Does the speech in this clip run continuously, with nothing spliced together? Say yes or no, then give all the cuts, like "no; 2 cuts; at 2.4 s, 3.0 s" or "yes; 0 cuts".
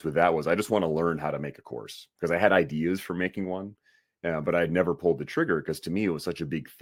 yes; 0 cuts